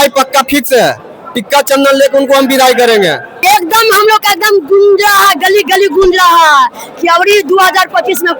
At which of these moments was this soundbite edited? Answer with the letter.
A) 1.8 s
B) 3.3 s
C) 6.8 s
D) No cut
B